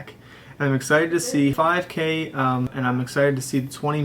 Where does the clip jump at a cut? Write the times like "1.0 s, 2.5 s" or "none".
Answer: 1.5 s, 2.7 s